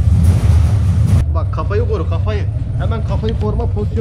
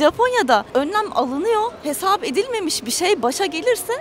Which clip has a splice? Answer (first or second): first